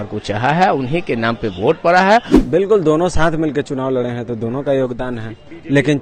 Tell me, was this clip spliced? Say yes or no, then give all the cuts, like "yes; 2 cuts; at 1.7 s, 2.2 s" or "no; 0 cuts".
yes; 1 cut; at 2.4 s